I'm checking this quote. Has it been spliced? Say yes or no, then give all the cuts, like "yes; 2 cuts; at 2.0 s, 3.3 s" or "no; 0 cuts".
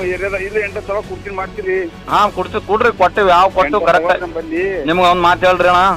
no; 0 cuts